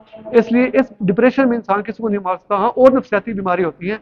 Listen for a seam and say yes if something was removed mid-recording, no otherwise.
no